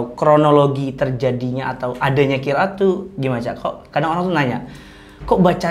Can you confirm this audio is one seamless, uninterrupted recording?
yes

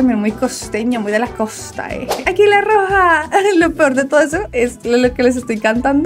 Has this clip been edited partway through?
yes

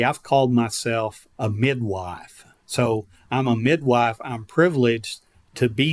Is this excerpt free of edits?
no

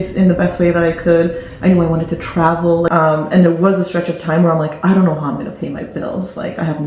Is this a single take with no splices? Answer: no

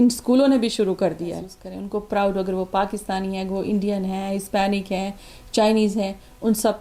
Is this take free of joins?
no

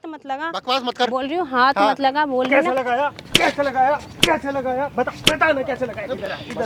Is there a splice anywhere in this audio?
no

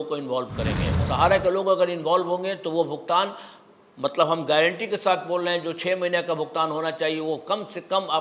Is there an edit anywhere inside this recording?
yes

